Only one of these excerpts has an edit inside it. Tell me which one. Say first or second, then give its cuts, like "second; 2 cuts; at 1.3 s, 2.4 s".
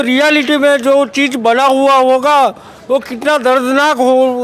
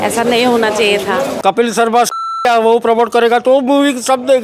second; 1 cut; at 1.3 s